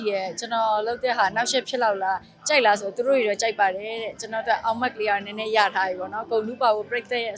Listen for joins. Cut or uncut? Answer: uncut